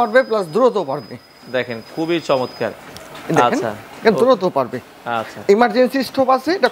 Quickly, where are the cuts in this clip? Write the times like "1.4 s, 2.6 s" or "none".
none